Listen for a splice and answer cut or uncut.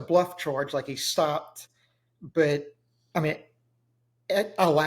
uncut